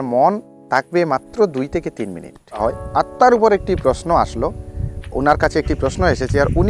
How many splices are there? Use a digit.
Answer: 1